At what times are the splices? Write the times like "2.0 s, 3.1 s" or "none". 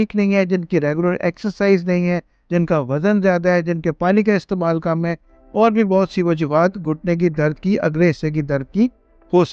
none